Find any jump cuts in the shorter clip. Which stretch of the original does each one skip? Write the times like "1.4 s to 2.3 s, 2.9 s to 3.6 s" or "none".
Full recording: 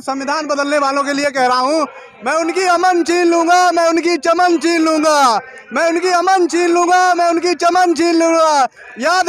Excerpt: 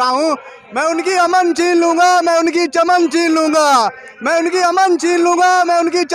none